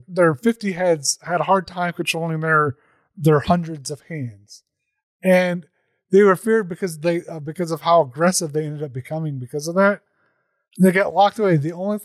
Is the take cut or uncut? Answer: uncut